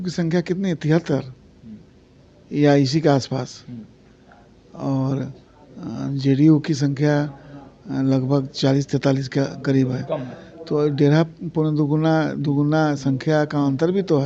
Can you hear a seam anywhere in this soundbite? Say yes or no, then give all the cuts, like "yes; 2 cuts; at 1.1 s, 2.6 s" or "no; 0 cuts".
no; 0 cuts